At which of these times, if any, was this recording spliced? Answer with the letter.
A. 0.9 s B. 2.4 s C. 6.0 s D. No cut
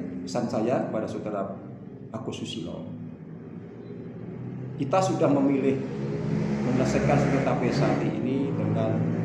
D